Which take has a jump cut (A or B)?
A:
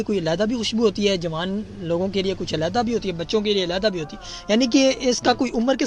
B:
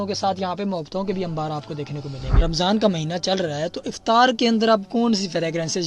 B